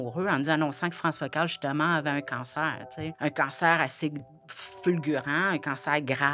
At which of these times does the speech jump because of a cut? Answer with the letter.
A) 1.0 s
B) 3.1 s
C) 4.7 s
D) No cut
B